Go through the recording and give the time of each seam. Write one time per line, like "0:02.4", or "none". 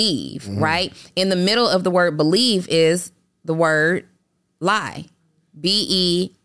none